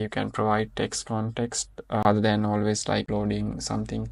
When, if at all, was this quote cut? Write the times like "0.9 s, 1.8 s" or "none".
none